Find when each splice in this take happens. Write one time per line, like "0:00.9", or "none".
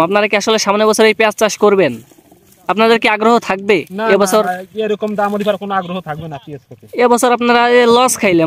none